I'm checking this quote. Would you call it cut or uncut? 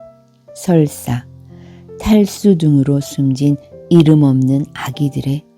uncut